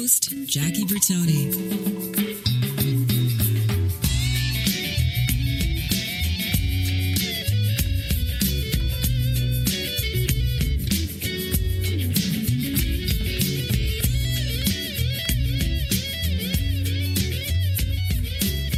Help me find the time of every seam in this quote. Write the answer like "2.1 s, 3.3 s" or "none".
none